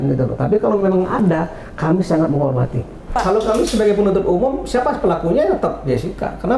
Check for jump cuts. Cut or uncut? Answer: cut